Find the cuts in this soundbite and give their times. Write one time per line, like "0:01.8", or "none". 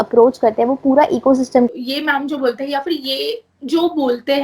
0:01.7